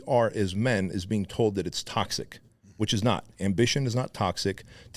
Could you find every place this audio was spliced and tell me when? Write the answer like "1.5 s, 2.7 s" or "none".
none

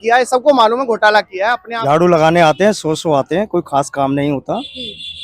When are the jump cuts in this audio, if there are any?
1.7 s

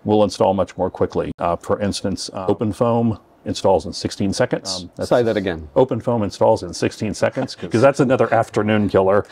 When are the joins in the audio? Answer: 2.3 s, 4.9 s, 7.5 s

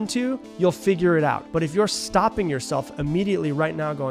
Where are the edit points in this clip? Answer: 1.4 s

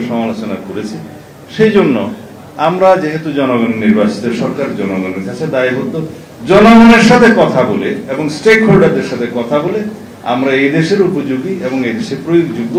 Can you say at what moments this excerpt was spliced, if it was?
none

